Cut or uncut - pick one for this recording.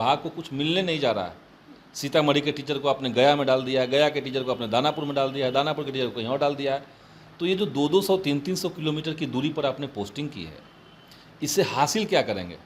uncut